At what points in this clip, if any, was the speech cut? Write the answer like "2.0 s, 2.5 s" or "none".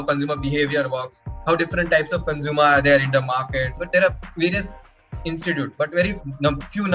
3.8 s